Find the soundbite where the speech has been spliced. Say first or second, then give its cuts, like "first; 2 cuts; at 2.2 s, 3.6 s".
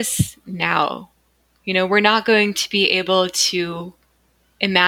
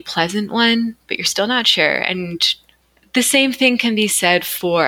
second; 1 cut; at 2.5 s